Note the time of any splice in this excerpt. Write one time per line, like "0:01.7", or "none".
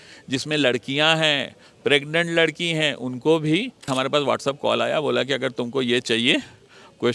0:03.8